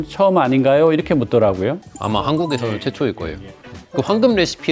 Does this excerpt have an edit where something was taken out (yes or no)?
yes